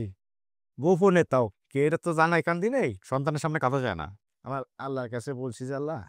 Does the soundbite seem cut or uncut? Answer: cut